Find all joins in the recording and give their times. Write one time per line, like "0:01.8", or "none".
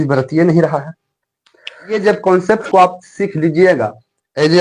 0:01.9

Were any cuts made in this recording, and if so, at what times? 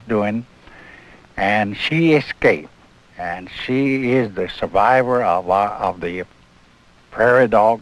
none

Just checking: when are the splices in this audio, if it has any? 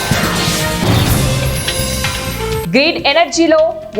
0:02.6

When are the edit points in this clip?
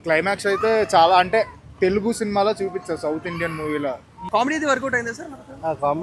0:04.1

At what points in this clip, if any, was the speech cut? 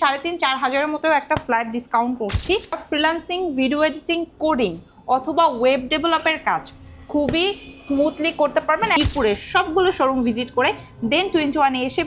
0:02.8
0:09.0

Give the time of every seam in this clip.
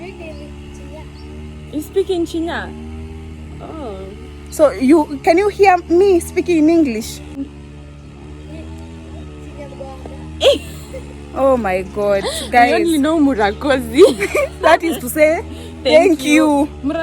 0:07.4

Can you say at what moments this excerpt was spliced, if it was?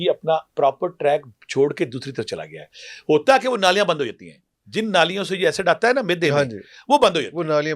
none

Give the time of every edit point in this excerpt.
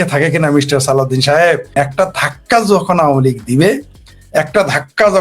0:01.7

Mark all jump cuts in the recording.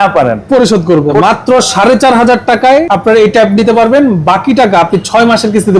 0:01.2
0:02.8

